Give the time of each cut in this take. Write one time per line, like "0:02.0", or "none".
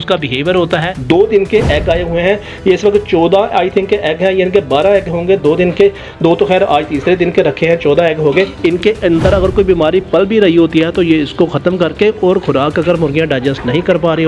0:01.0
0:08.5